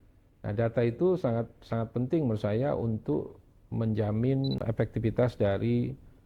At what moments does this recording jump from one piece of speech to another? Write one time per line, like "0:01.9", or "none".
0:04.6